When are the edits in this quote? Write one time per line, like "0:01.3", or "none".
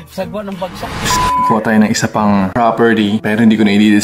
0:01.3